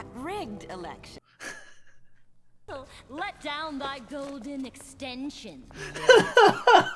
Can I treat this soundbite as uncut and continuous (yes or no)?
no